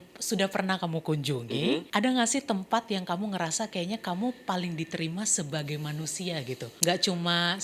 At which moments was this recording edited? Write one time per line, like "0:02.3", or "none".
0:01.9
0:06.7